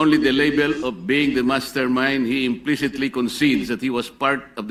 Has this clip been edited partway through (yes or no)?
no